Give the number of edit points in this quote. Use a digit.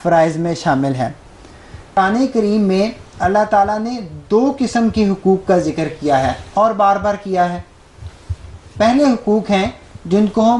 1